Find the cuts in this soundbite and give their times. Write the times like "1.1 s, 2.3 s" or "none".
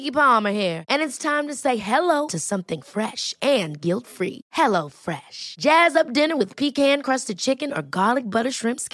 none